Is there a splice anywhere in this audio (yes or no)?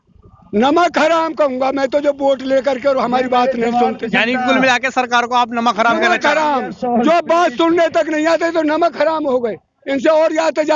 no